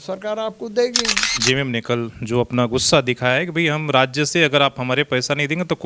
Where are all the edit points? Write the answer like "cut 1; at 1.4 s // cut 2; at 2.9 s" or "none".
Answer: cut 1; at 1.3 s